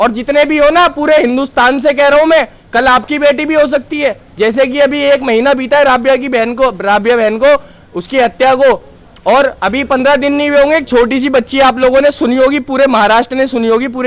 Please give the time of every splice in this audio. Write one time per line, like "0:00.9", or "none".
none